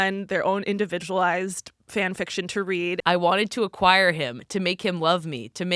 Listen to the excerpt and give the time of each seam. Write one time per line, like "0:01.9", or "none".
0:03.0